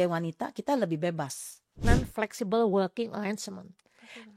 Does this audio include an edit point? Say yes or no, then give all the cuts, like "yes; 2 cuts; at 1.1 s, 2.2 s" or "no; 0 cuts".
yes; 1 cut; at 1.8 s